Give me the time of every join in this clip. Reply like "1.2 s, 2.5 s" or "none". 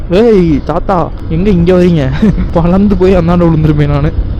1.2 s, 2.4 s